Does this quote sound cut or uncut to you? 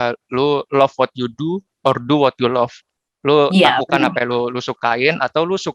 uncut